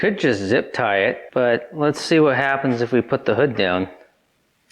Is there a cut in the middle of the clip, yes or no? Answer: yes